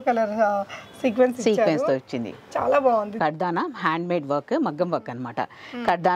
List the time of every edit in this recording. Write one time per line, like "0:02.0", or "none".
0:03.2